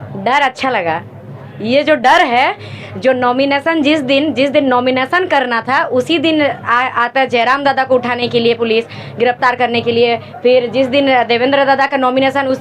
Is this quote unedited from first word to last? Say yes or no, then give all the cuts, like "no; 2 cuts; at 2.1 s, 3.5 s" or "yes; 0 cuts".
yes; 0 cuts